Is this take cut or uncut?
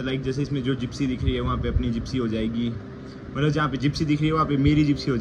uncut